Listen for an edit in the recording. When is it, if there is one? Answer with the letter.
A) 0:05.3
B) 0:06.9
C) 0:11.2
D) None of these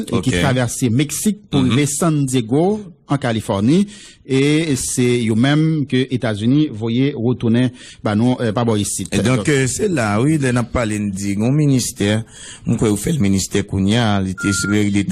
D